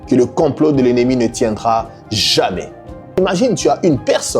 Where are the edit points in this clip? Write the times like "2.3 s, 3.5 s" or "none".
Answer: 3.1 s